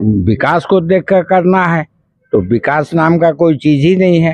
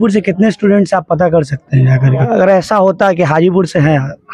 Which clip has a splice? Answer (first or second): second